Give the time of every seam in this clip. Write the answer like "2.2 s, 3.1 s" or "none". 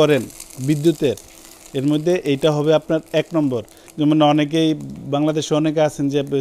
none